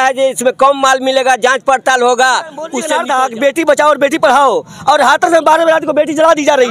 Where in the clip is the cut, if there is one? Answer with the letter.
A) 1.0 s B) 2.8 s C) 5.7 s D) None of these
B